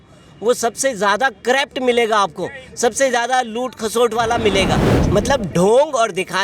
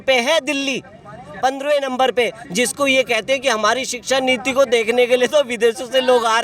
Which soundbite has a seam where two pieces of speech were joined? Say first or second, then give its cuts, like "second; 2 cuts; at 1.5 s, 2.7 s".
first; 1 cut; at 4.9 s